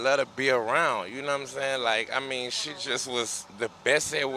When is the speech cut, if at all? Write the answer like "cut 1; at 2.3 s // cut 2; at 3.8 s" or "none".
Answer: cut 1; at 3.4 s